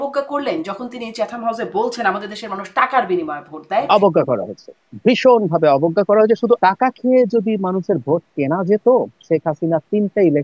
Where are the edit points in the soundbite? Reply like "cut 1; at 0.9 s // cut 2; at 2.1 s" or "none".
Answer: cut 1; at 3.9 s // cut 2; at 6.6 s